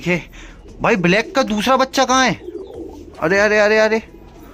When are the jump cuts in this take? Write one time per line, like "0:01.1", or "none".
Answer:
none